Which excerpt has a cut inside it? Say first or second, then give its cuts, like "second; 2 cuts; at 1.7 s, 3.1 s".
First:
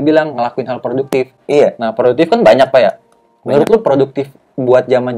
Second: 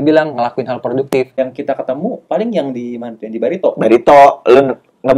second; 1 cut; at 1.4 s